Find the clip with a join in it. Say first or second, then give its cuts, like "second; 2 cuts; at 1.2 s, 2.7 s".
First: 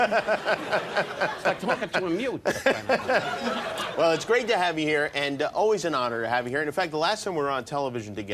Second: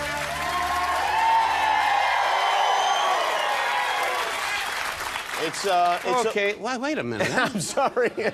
second; 1 cut; at 3.8 s